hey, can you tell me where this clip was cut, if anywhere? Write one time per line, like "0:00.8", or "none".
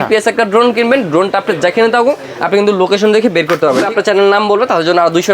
0:03.8